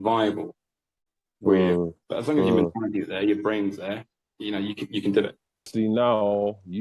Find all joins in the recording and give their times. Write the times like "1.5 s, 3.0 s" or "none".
2.0 s, 5.7 s

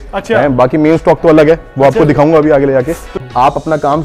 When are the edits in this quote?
3.0 s

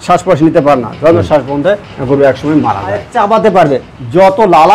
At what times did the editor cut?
3.1 s

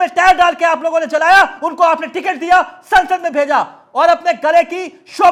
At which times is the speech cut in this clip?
none

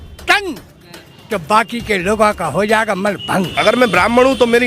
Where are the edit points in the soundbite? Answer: 3.5 s

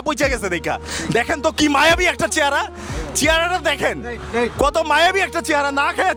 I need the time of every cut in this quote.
none

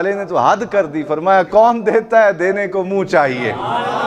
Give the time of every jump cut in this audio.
none

